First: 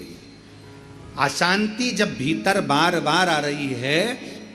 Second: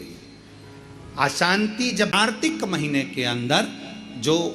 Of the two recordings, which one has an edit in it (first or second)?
second